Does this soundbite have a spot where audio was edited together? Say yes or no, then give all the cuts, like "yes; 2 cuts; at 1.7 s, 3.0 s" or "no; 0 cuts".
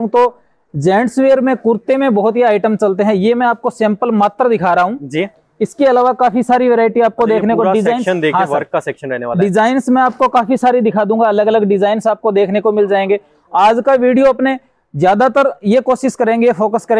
no; 0 cuts